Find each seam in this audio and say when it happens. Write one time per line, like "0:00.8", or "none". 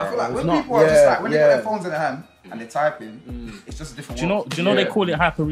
none